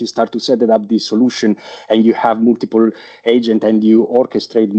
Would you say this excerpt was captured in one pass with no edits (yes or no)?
yes